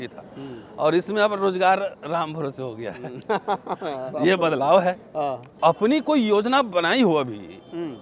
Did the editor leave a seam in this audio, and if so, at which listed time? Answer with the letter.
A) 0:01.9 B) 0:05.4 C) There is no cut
B